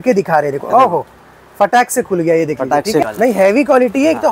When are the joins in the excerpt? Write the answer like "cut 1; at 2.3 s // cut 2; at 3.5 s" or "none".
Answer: cut 1; at 3.1 s